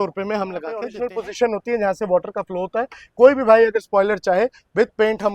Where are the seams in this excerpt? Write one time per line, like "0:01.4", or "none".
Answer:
0:00.9